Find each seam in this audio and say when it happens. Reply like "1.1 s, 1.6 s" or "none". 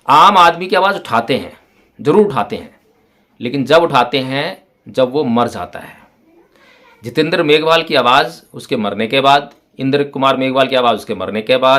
none